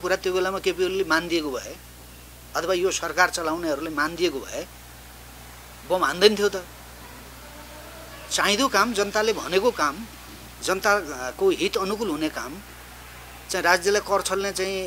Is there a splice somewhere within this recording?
no; 0 cuts

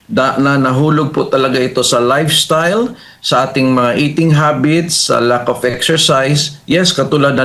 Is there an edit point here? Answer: no; 0 cuts

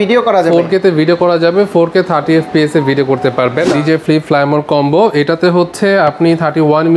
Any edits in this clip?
yes; 1 cut; at 3.7 s

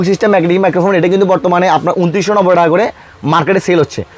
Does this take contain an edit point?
no; 0 cuts

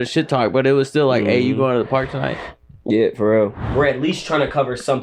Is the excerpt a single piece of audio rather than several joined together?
no; 1 cut; at 3.6 s

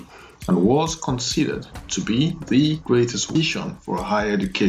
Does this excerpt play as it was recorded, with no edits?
no; 1 cut; at 3.3 s

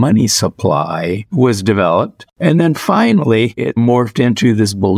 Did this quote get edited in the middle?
yes; 1 cut; at 2.2 s

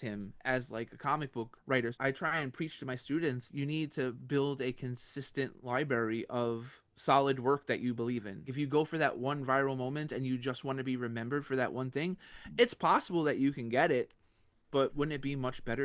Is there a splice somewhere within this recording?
yes; 4 cuts; at 1.9 s, 3.5 s, 8.5 s, 14.9 s

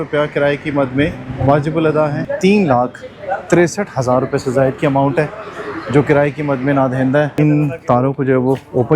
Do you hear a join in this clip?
yes; 2 cuts; at 2.3 s, 7.3 s

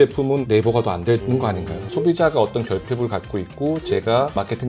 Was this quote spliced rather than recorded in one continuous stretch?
yes; 1 cut; at 1.9 s

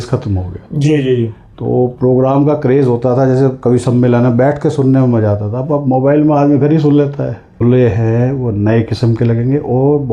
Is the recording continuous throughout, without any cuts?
no; 1 cut; at 7.6 s

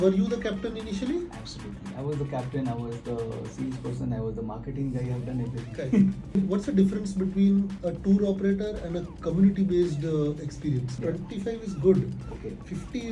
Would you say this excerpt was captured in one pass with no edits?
no; 2 cuts; at 6.3 s, 10.9 s

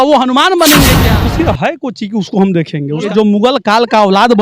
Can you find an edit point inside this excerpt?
yes; 2 cuts; at 1.1 s, 3.1 s

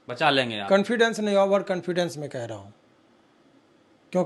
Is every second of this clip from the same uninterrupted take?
yes; 0 cuts

